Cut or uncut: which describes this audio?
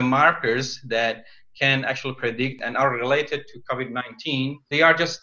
cut